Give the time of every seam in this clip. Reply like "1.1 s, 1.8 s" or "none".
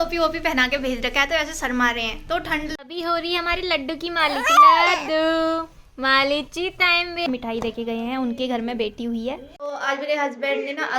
2.7 s, 7.3 s, 9.5 s